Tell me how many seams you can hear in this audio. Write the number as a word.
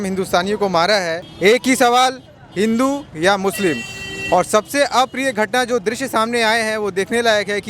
one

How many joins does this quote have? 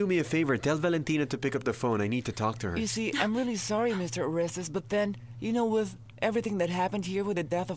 one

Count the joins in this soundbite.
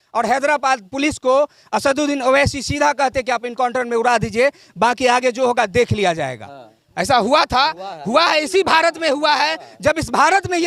zero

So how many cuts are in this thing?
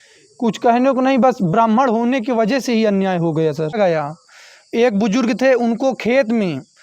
one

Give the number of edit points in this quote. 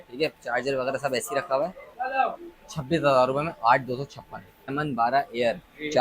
one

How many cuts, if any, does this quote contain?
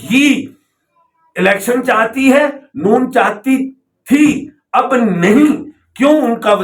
zero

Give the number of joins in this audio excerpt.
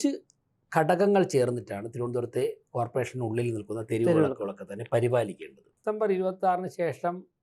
one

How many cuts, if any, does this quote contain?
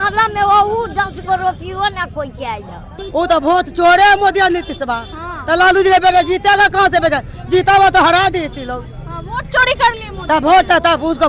one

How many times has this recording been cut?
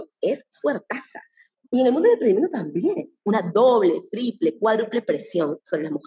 two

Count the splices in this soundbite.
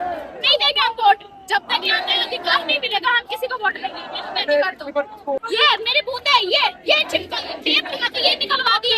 one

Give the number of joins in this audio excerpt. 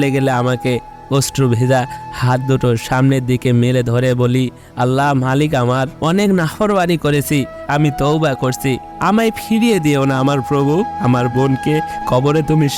zero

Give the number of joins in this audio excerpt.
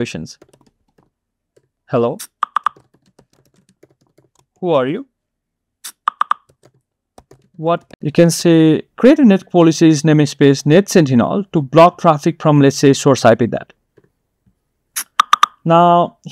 two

